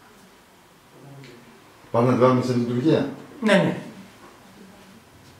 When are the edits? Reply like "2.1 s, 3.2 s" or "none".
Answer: 1.5 s